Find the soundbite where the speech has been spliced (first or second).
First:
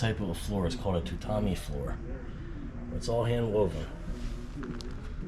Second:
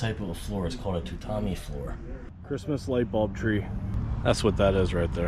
second